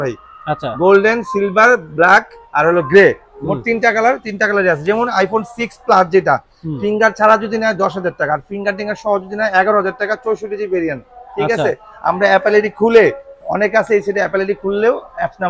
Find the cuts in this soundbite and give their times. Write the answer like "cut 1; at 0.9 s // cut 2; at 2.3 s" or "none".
none